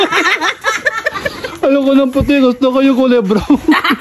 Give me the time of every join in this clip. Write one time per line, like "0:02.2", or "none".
none